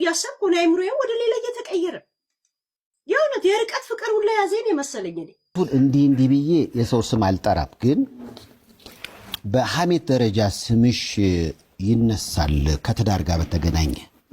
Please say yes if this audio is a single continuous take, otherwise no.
no